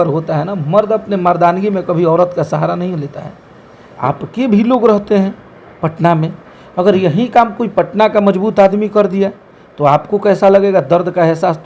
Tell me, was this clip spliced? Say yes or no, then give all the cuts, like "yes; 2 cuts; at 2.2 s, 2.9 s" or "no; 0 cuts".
yes; 1 cut; at 4.0 s